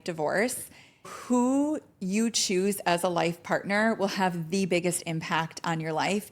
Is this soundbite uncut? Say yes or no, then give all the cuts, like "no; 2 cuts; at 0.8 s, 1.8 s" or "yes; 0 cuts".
no; 1 cut; at 1.1 s